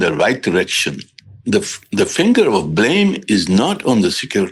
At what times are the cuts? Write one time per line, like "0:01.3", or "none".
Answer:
none